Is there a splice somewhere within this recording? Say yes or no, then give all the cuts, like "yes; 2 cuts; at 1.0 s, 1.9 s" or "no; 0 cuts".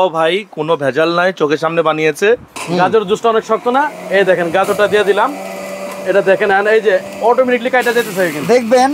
yes; 1 cut; at 2.5 s